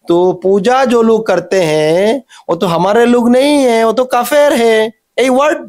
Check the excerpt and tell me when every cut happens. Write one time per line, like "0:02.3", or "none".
none